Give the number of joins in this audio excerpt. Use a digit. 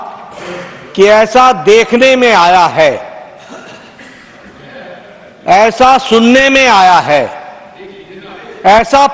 0